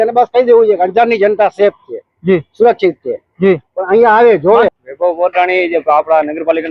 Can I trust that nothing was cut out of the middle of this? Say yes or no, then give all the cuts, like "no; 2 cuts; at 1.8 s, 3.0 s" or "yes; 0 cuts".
no; 1 cut; at 4.7 s